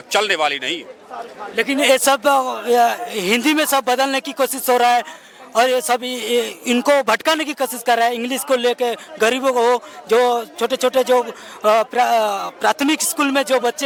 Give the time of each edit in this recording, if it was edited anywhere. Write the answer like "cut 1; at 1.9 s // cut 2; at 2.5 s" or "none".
none